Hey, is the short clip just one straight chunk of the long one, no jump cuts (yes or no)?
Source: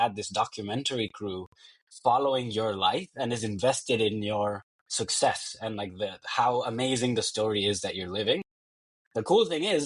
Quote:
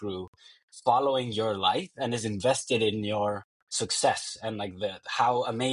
yes